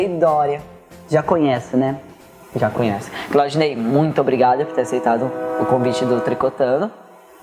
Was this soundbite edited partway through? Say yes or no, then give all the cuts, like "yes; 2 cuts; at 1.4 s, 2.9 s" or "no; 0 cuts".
yes; 1 cut; at 4.1 s